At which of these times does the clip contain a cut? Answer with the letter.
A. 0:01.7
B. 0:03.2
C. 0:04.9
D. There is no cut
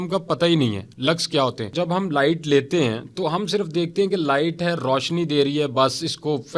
A